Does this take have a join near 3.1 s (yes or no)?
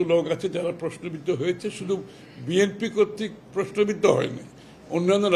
no